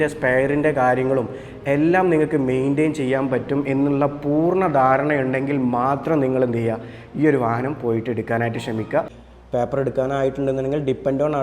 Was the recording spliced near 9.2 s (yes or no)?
yes